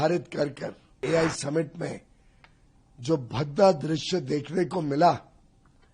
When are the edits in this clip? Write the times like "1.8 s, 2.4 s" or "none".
0.9 s